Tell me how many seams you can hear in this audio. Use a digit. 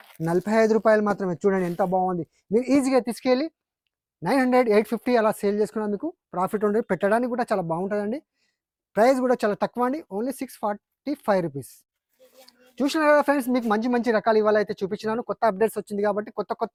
0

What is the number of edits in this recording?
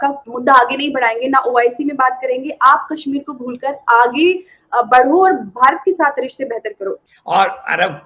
1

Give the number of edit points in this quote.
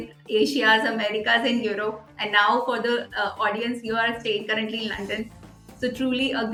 0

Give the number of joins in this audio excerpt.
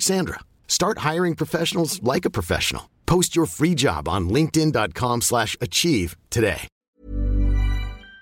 1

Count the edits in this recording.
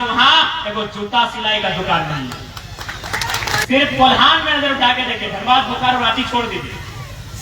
1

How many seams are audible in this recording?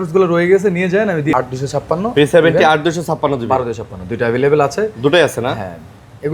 1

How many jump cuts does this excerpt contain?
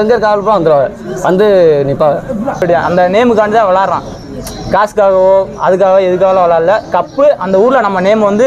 1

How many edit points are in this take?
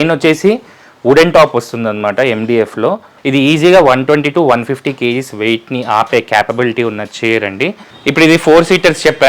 2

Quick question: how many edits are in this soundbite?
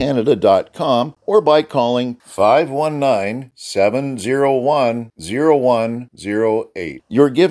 1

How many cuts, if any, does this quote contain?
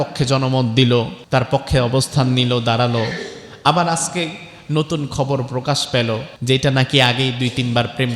2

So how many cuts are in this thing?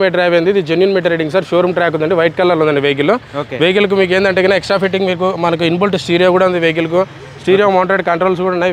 0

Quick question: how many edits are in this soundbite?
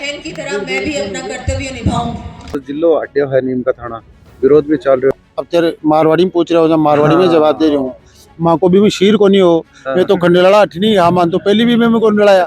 2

